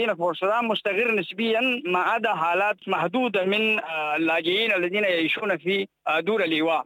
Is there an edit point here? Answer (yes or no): yes